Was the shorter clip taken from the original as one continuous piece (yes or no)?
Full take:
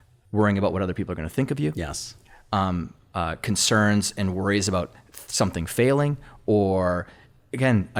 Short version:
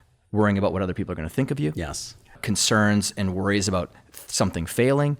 no